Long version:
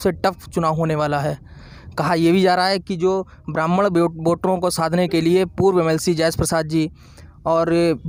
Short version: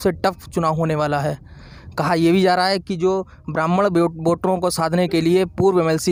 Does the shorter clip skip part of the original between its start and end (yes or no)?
no